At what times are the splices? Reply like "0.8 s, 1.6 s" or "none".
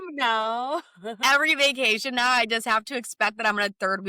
1.2 s